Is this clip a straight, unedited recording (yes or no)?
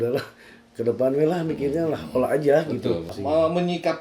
no